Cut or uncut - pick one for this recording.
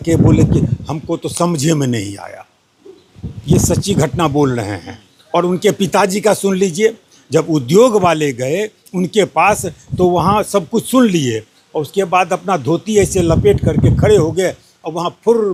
uncut